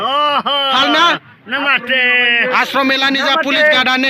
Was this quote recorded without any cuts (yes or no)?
yes